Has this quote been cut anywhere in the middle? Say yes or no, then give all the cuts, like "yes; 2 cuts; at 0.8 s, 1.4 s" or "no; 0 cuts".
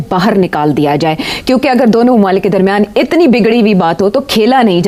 no; 0 cuts